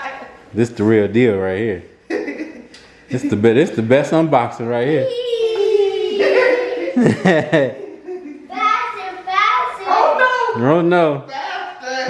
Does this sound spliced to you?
no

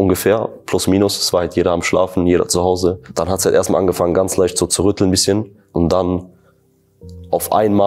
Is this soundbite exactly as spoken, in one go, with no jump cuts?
no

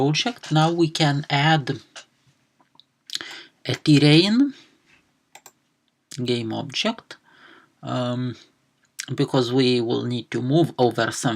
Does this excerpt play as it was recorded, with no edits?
no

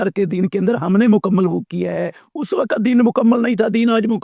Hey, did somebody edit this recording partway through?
no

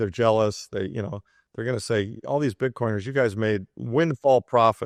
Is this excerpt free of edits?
yes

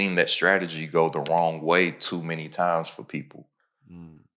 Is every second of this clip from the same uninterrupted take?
yes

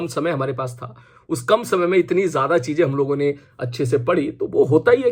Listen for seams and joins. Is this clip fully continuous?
yes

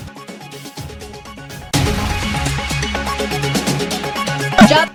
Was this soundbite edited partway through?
no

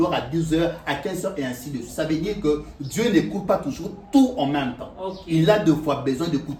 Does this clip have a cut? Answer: no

